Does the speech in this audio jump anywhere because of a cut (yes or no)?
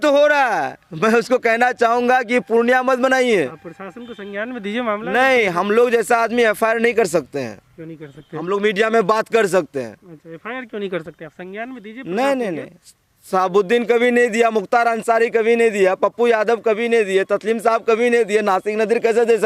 no